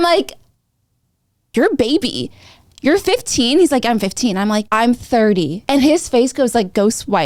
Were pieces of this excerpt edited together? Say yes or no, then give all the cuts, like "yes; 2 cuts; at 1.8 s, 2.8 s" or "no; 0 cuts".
no; 0 cuts